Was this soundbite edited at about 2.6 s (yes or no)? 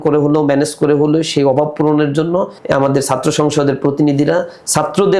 yes